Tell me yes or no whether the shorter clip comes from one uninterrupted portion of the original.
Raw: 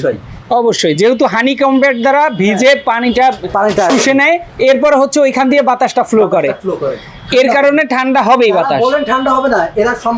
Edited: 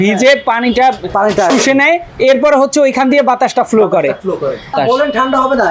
no